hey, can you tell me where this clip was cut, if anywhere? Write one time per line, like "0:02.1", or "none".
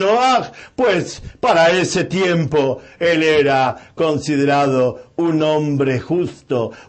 none